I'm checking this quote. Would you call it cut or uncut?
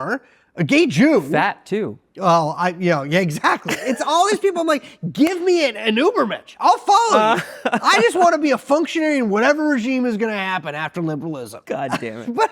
cut